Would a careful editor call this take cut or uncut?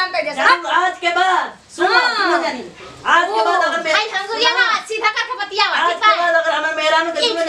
uncut